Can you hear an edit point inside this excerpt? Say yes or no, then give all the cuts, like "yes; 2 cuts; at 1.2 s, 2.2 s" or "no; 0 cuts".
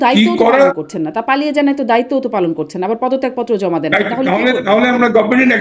no; 0 cuts